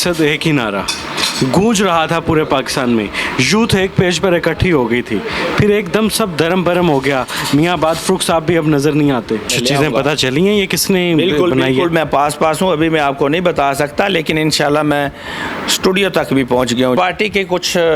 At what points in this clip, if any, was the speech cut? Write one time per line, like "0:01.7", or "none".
0:09.5
0:17.0